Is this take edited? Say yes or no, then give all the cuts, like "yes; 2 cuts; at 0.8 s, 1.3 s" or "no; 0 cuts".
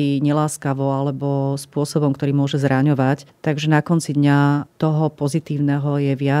no; 0 cuts